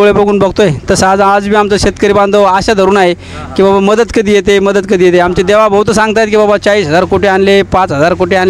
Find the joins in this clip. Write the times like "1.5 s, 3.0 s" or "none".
none